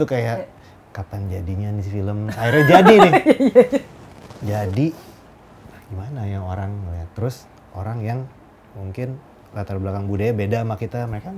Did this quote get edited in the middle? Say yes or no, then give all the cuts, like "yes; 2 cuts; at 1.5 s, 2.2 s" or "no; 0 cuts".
no; 0 cuts